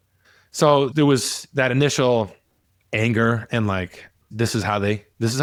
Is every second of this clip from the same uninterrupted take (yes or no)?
yes